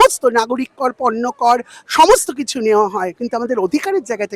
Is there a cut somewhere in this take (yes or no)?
yes